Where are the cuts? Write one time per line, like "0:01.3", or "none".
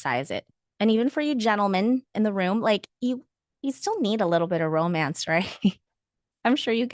0:02.1